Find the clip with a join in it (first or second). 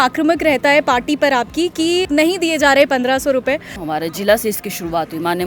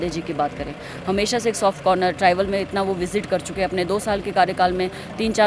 first